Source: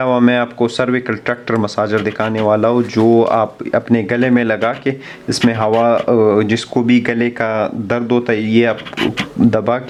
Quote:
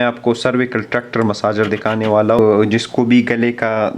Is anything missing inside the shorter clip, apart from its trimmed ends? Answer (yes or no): yes